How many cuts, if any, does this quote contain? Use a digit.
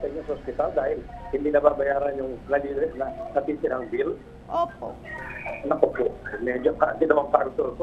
0